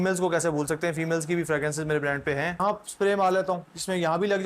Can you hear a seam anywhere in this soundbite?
yes; 1 cut; at 2.6 s

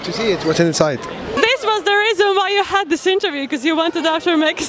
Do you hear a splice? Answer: yes; 1 cut; at 1.2 s

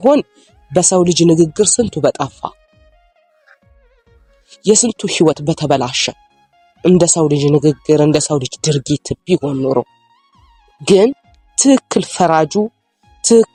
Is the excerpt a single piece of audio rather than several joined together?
yes; 0 cuts

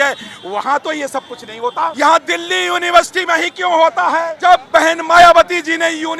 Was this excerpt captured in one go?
no; 2 cuts; at 1.9 s, 4.3 s

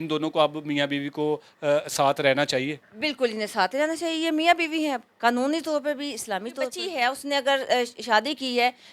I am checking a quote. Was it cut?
yes; 1 cut; at 6.8 s

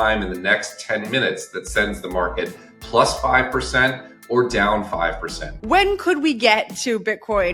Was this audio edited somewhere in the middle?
yes; 1 cut; at 5.6 s

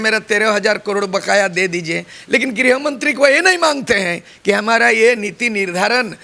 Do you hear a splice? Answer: no; 0 cuts

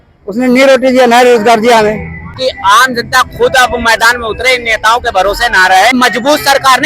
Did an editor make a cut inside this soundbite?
yes; 2 cuts; at 2.3 s, 5.9 s

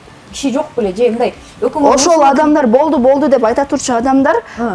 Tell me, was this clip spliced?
no; 0 cuts

